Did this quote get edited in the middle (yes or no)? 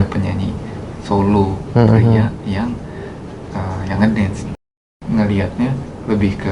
yes